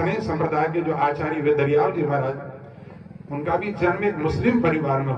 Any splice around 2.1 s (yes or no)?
no